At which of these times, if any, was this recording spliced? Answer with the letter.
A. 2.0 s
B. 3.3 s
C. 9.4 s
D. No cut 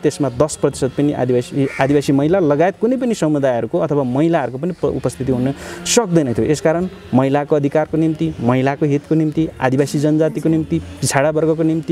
D